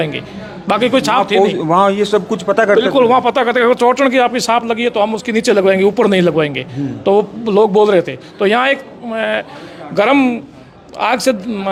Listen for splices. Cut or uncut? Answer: uncut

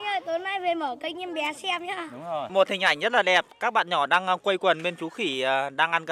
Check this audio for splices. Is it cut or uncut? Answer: cut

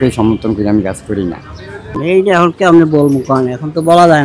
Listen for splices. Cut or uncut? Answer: cut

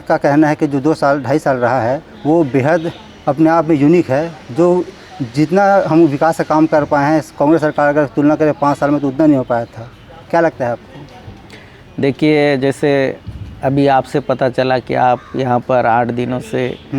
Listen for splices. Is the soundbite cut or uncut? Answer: uncut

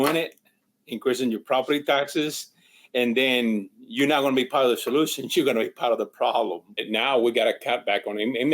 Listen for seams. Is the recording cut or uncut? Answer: cut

